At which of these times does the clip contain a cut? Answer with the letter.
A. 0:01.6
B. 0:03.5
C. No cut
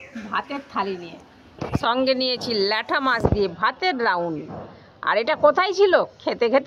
A